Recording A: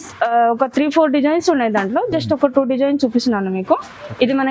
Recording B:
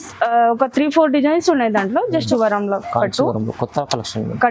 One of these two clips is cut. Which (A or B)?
B